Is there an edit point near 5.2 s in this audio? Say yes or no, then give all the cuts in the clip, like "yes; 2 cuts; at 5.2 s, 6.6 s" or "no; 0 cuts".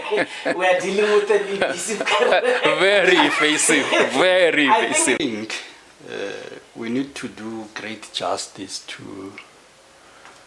yes; 1 cut; at 5.2 s